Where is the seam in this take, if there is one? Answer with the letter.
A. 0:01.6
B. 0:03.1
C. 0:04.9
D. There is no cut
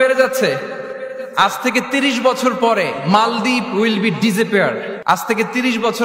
C